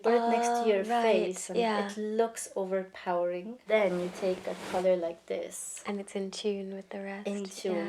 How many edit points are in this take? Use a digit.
1